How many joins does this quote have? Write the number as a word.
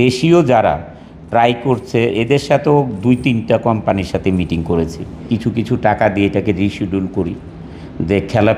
one